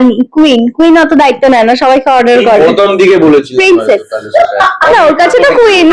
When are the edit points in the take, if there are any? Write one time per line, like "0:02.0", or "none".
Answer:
none